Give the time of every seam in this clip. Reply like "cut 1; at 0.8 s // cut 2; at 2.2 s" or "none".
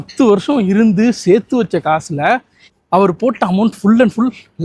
cut 1; at 2.6 s